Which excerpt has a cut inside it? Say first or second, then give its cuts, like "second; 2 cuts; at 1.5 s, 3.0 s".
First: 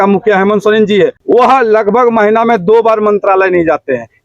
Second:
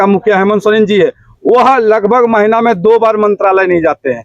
first; 1 cut; at 1.2 s